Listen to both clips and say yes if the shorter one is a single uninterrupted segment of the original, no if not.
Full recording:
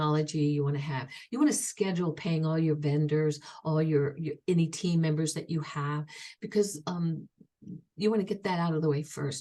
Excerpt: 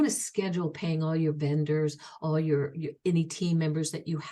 yes